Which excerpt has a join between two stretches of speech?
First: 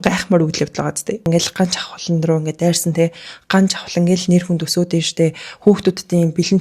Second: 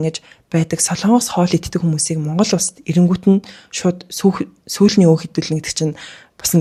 first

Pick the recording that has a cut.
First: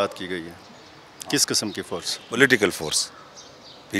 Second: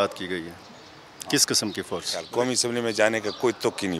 second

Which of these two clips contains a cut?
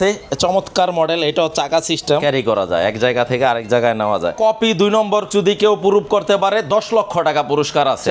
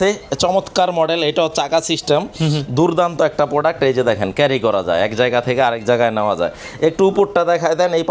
first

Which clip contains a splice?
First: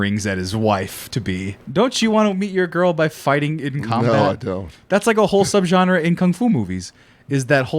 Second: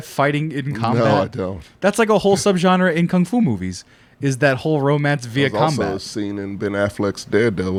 first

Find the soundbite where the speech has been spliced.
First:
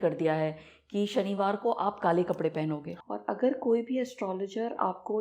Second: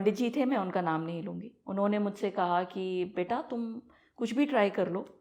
first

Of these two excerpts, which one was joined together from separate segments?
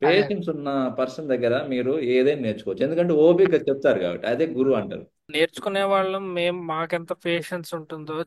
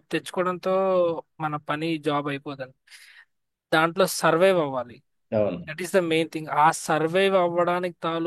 first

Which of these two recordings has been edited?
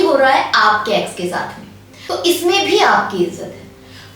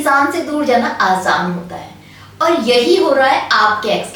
first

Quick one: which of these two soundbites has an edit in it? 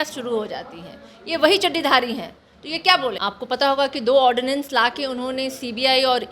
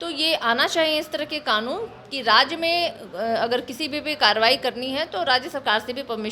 first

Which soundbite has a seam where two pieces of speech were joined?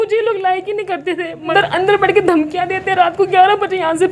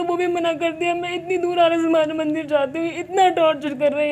first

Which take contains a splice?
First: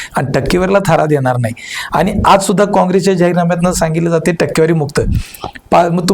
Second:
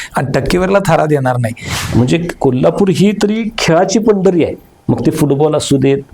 second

